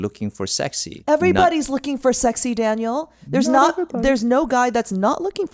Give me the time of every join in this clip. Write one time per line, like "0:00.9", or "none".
0:01.0